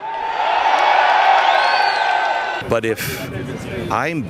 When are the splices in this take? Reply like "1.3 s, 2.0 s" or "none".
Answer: 2.6 s